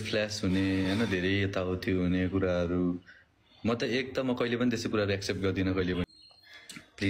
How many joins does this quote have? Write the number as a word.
one